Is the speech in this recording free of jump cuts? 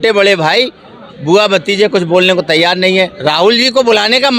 no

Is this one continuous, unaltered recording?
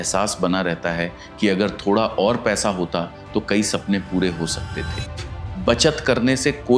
no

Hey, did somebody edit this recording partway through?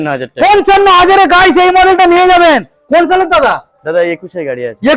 no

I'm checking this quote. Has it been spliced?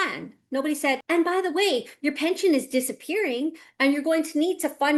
no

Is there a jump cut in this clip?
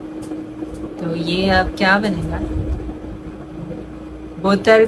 no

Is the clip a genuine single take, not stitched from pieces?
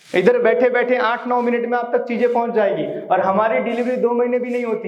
yes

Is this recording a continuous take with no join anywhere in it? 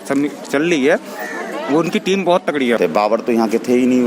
no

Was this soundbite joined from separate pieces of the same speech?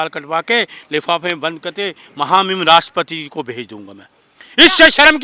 no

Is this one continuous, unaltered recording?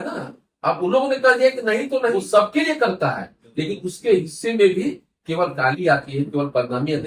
no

